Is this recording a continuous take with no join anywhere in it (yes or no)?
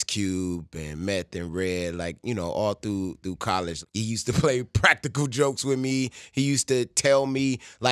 no